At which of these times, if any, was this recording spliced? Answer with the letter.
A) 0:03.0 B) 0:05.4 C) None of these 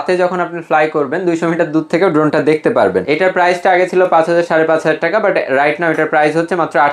A